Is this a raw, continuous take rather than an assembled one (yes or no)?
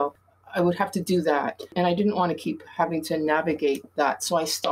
no